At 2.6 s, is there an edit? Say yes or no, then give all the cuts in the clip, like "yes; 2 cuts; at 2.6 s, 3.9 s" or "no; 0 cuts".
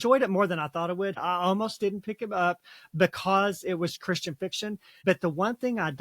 no; 2 cuts; at 1.2 s, 5.0 s